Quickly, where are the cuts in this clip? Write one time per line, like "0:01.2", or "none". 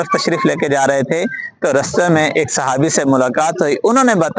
none